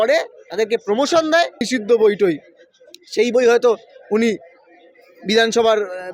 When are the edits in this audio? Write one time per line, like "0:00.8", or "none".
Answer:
0:01.6